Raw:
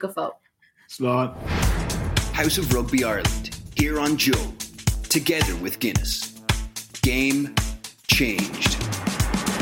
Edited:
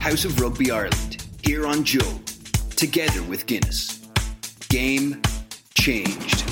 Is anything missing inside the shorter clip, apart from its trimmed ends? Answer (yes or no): no